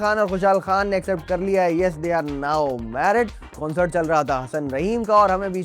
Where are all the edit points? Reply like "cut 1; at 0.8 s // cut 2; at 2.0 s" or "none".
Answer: cut 1; at 3.5 s